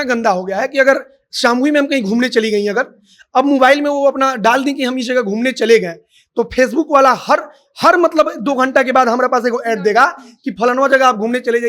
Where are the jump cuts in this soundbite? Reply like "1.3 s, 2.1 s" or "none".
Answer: none